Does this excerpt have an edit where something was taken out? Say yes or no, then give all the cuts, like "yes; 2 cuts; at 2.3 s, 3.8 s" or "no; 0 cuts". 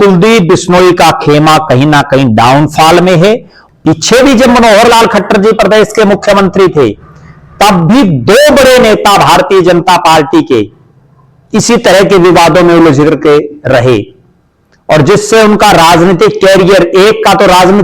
yes; 1 cut; at 3.5 s